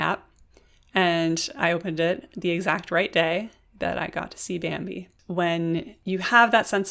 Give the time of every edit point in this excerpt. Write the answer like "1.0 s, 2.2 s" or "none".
5.1 s, 5.9 s